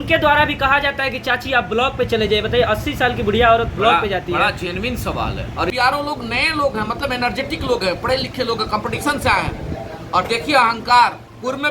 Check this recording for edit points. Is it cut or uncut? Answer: cut